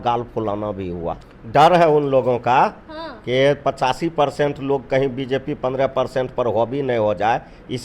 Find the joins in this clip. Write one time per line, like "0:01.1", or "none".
0:01.3

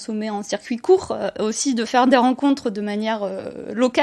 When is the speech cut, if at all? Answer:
none

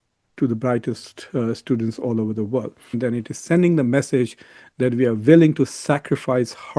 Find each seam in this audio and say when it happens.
0:03.0

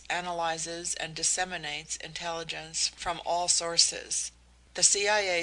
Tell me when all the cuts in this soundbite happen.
0:01.8

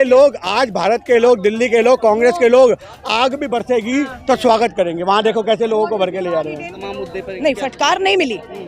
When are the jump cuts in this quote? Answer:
0:06.8

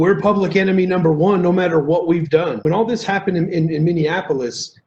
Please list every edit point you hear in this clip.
0:02.6

